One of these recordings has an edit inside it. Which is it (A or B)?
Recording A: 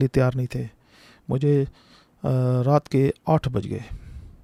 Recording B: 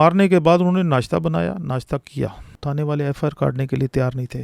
B